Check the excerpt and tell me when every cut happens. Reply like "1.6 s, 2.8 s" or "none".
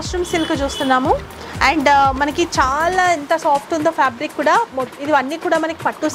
none